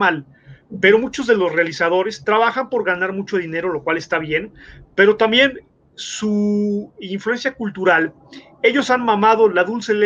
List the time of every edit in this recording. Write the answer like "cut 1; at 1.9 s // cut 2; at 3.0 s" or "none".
none